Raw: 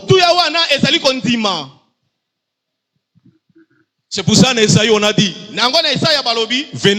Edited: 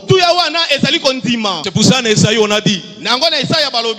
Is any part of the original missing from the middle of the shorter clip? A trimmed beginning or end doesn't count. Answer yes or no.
yes